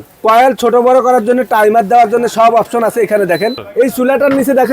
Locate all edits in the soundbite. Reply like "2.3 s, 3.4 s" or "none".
3.6 s